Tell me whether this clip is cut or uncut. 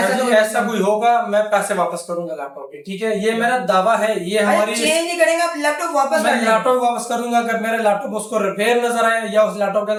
uncut